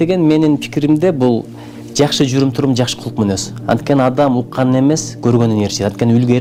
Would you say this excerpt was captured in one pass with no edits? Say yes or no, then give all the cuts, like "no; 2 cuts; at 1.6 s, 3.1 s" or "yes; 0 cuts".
yes; 0 cuts